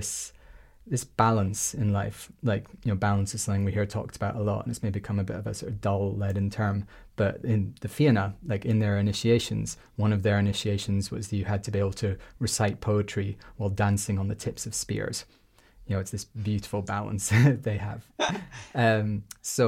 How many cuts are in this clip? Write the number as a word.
zero